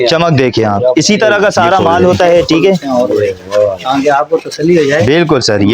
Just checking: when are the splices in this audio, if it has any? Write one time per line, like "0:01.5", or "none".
0:02.8